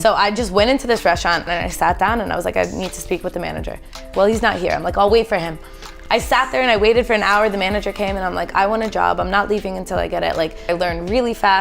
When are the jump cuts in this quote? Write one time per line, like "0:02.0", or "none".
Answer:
0:01.5
0:04.1
0:05.9
0:10.7